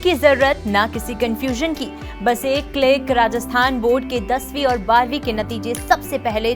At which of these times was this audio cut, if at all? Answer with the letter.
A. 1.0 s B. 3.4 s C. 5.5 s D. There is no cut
D